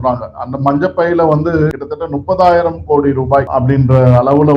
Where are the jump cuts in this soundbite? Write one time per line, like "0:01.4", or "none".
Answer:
0:01.8
0:03.5